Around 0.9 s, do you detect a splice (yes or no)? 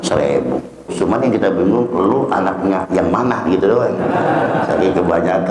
yes